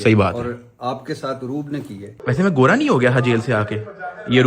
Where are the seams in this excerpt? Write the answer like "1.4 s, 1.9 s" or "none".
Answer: 2.1 s